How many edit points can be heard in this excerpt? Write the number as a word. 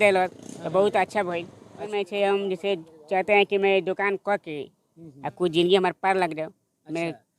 one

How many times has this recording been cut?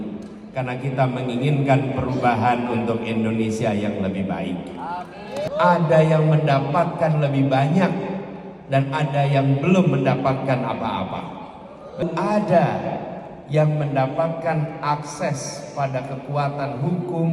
two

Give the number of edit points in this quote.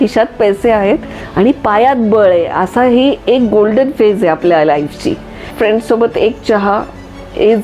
one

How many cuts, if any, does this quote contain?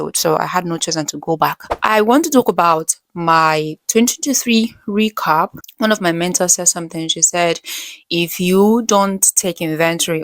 two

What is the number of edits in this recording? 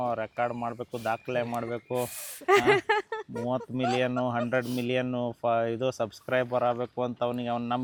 zero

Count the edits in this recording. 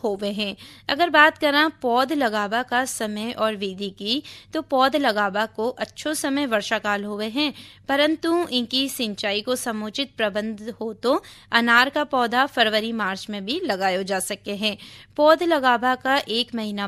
zero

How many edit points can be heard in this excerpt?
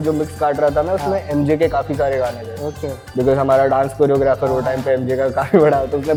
zero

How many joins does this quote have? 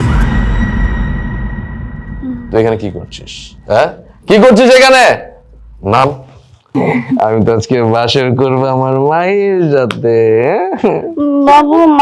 one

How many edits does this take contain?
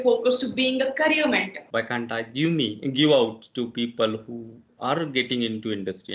one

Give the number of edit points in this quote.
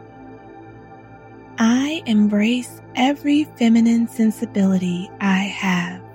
one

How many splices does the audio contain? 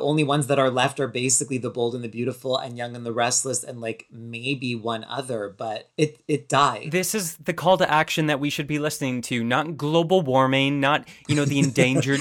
zero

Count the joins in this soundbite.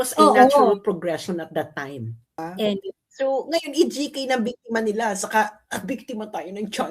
one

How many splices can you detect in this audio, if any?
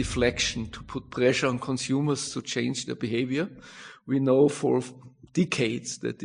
zero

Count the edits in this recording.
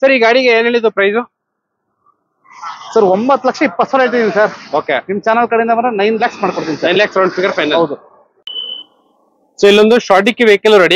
zero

